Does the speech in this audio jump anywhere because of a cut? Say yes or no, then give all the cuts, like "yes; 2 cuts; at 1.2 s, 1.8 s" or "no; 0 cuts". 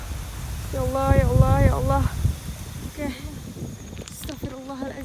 yes; 1 cut; at 3.4 s